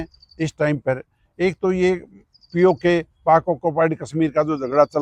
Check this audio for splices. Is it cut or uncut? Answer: uncut